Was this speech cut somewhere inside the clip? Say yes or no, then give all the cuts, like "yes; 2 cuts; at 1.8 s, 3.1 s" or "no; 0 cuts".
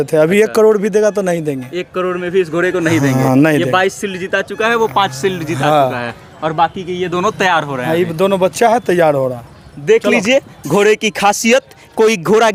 no; 0 cuts